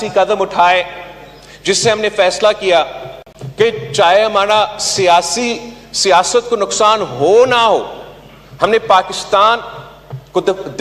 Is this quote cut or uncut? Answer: uncut